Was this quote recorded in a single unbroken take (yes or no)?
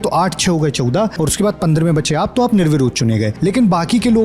no